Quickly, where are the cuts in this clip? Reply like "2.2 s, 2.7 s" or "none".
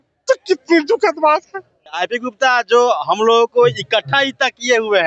2.1 s